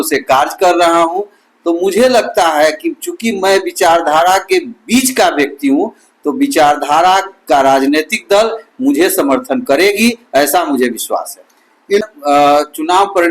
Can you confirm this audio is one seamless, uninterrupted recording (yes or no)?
no